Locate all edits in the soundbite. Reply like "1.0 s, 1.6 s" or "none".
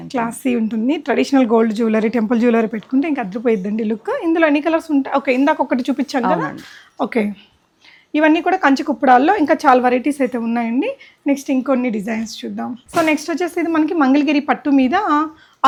none

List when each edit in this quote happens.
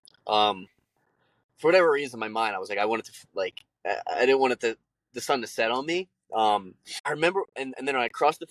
7.1 s

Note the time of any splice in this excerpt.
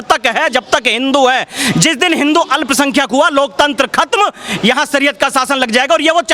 none

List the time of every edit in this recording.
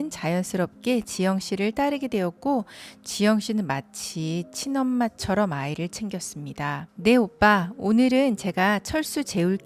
6.9 s

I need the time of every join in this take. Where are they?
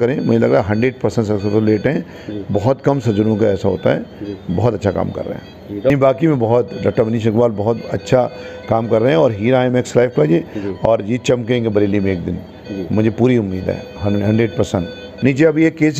none

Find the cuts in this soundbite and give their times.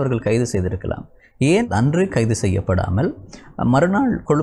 1.7 s

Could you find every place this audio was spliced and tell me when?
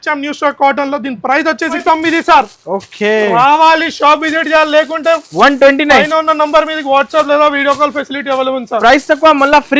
1.8 s

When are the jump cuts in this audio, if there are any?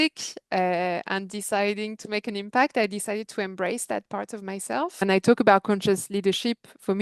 5.0 s

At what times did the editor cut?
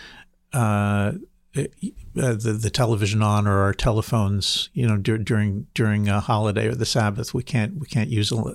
none

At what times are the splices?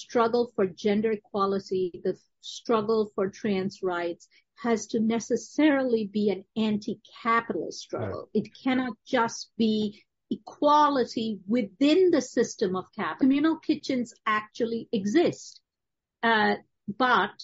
13.1 s

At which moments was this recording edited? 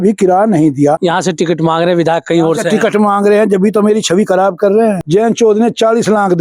1.0 s, 5.0 s

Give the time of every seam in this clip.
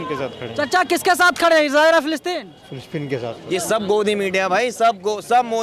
3.4 s

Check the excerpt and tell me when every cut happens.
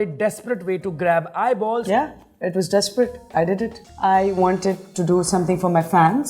1.8 s, 3.8 s

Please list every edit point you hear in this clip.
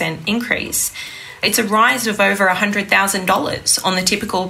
1.4 s

